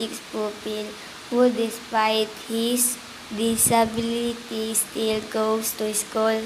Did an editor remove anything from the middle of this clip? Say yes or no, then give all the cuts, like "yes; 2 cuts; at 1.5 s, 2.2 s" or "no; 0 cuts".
yes; 1 cut; at 4.8 s